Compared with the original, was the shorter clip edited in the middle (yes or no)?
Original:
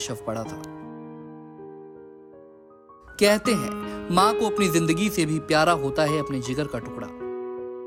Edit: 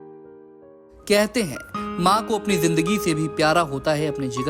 yes